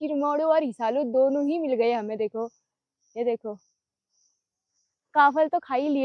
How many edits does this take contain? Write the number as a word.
zero